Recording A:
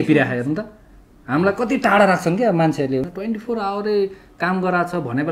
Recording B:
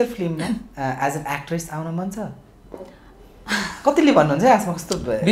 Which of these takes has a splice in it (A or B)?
A